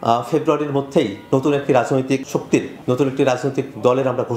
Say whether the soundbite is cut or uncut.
uncut